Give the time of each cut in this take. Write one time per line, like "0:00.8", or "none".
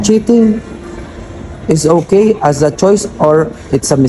none